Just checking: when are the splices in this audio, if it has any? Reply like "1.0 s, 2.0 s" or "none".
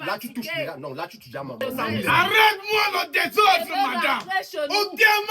1.6 s

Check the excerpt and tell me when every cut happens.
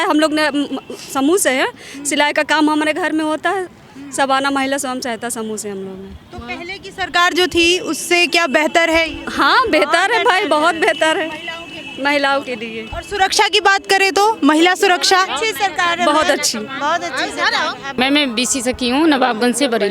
17.9 s

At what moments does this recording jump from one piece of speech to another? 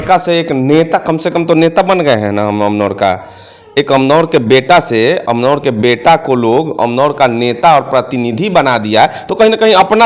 none

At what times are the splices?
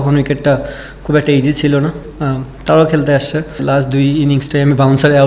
2.1 s, 3.6 s

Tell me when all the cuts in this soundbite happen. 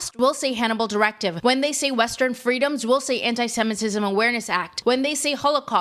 1.4 s, 4.6 s

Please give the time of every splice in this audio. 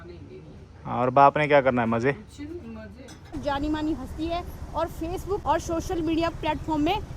3.4 s, 5.4 s

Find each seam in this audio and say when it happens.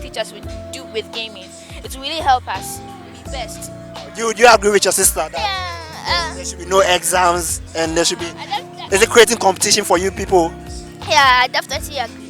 none

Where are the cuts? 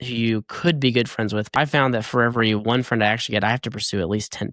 1.5 s

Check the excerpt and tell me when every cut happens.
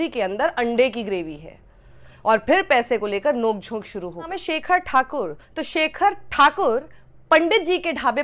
4.3 s

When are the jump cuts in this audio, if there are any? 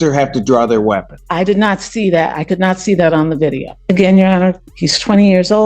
1.2 s, 3.7 s

